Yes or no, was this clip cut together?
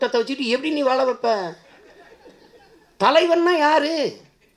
no